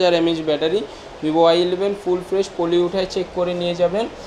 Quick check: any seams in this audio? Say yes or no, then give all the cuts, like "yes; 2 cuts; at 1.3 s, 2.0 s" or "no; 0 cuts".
no; 0 cuts